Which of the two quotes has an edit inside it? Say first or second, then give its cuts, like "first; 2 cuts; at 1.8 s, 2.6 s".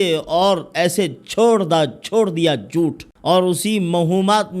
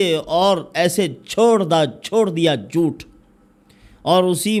first; 1 cut; at 3.1 s